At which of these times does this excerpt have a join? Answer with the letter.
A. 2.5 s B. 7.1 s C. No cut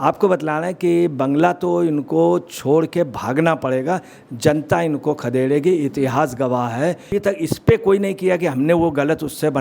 B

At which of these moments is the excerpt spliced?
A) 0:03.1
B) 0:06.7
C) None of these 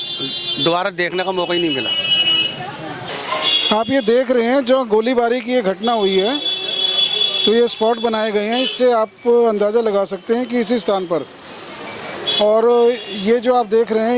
A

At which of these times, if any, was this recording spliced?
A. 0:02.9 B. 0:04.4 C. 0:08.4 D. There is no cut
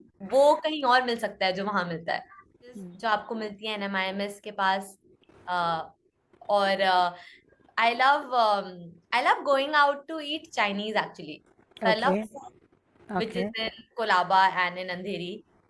A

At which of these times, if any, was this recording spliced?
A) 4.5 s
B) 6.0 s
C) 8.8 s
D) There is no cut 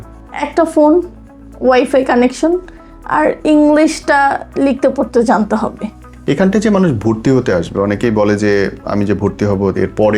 D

